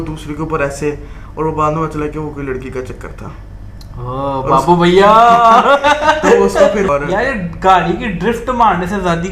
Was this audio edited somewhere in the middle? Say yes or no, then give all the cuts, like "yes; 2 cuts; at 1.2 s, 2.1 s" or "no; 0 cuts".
yes; 1 cut; at 6.9 s